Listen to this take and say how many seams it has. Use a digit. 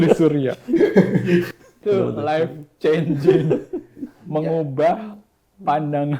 1